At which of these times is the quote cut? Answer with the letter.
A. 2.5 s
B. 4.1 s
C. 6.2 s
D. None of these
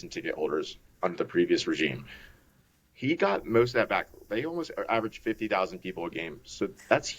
D